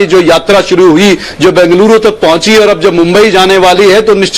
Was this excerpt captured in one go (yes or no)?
yes